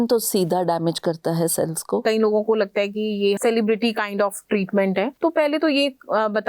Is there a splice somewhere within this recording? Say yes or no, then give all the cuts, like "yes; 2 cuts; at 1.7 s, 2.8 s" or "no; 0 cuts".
yes; 3 cuts; at 2.0 s, 3.4 s, 5.1 s